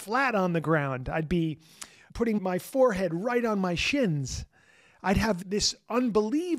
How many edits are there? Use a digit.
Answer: 2